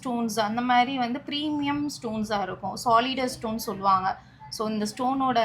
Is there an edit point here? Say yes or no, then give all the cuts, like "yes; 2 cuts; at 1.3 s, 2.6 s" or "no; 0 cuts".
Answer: no; 0 cuts